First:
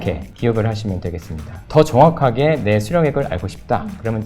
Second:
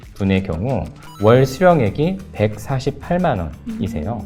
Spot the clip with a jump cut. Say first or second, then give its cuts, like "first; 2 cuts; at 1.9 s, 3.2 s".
first; 1 cut; at 1.6 s